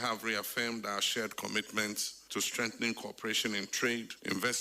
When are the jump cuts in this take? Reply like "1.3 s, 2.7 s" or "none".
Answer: 2.1 s